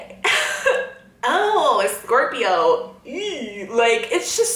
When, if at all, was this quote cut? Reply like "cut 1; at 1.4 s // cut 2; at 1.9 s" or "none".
none